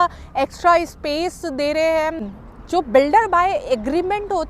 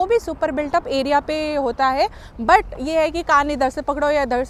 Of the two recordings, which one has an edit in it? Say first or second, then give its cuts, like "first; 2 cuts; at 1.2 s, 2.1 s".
first; 1 cut; at 2.3 s